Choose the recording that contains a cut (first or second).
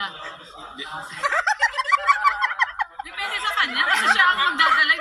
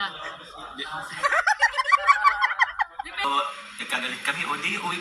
second